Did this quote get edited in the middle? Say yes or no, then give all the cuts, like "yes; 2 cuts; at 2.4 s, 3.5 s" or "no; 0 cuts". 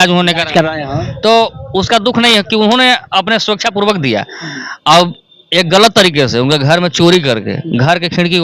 no; 0 cuts